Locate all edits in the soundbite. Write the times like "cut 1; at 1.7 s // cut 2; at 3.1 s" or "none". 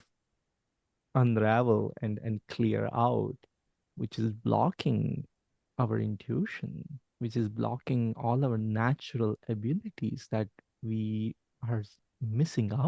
cut 1; at 11.5 s